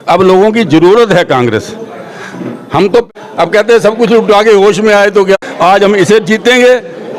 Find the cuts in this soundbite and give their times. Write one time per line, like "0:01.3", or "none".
0:03.1
0:05.4